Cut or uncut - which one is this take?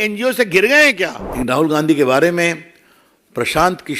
cut